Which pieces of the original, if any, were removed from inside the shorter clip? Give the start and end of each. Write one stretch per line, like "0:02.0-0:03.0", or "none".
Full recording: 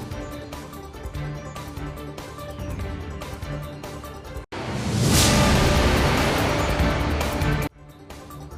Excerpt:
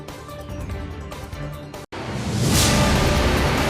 0:04.0-0:04.5